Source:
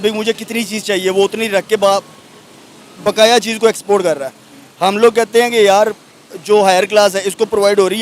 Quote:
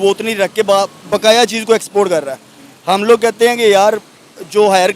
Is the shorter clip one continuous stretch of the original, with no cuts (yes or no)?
no